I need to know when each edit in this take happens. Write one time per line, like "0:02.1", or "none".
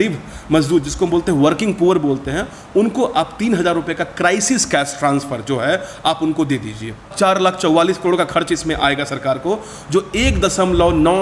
0:07.0